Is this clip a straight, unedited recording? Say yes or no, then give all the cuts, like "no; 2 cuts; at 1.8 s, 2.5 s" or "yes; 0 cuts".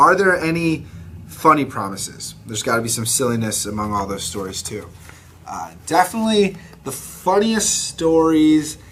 yes; 0 cuts